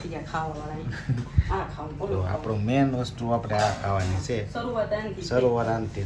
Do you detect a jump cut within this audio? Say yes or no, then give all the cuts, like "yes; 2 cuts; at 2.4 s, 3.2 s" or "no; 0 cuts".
no; 0 cuts